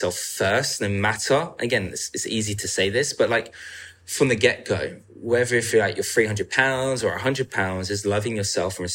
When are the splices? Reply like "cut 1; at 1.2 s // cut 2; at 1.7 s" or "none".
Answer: none